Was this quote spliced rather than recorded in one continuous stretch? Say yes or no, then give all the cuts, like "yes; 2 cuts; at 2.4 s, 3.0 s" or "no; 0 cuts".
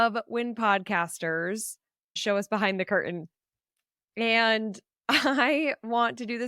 yes; 1 cut; at 2.1 s